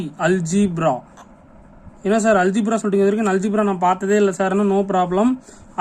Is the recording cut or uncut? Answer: uncut